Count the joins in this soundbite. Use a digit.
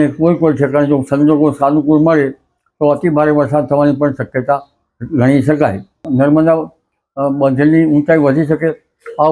1